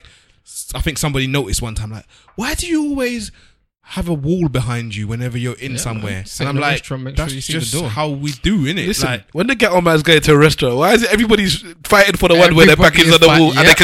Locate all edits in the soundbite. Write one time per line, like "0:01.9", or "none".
none